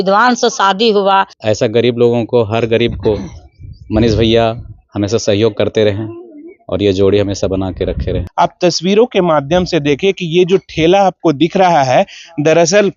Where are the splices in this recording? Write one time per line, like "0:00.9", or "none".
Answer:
0:01.3
0:08.2